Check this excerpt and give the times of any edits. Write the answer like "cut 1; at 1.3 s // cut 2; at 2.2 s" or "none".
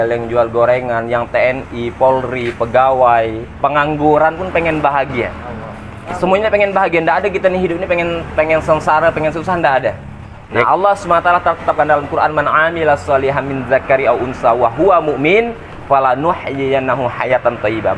cut 1; at 10.6 s